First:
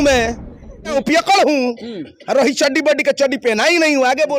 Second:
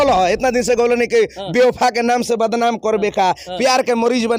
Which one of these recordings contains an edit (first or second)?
first